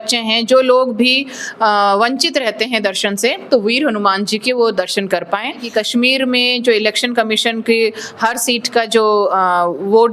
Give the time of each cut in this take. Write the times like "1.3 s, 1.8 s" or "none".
5.6 s